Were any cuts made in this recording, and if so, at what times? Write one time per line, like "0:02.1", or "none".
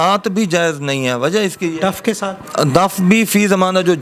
0:02.4